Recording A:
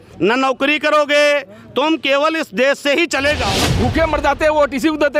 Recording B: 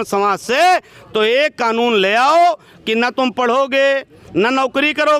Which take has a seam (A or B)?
A